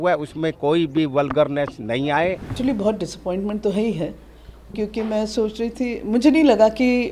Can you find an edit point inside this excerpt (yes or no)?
yes